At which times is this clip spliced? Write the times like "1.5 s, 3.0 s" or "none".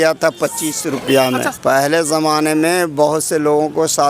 1.5 s